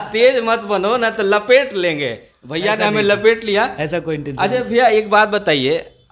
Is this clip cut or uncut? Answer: uncut